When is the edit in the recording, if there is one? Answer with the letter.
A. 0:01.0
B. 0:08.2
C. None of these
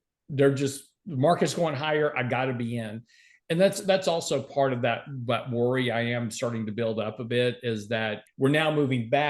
B